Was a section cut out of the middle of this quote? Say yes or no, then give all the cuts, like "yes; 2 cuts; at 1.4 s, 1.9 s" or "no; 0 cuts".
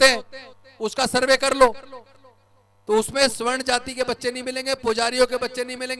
no; 0 cuts